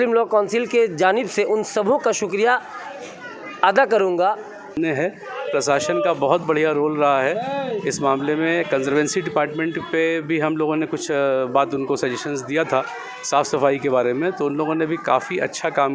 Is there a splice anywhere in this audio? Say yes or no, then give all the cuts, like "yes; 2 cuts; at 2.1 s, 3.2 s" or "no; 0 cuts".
yes; 1 cut; at 4.8 s